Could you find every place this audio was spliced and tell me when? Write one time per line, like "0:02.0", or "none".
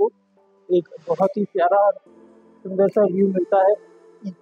none